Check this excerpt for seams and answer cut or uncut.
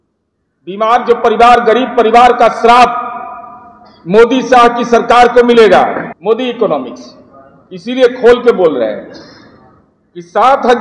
cut